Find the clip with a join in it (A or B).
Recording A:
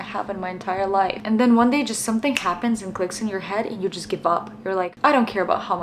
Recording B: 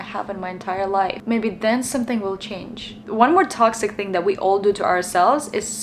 A